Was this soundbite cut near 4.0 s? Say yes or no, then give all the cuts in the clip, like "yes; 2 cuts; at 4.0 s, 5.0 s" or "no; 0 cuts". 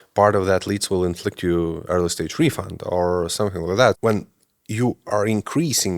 yes; 1 cut; at 4.0 s